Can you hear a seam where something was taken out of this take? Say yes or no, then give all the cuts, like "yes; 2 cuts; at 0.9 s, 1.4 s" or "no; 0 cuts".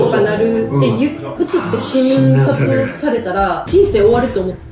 yes; 2 cuts; at 1.3 s, 3.6 s